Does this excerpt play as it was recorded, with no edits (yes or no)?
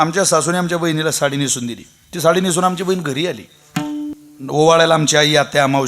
no